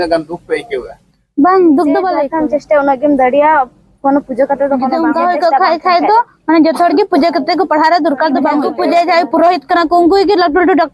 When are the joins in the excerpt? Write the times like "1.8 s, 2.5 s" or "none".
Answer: 2.2 s, 4.9 s, 8.7 s